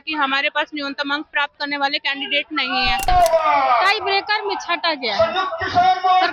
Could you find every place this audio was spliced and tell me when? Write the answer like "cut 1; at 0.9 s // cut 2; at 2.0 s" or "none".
cut 1; at 3.1 s